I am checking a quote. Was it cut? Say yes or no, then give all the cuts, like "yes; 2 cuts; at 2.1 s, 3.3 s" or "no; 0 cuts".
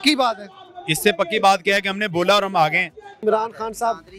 yes; 1 cut; at 3.2 s